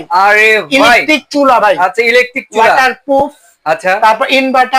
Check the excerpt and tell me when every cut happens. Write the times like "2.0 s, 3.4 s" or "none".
none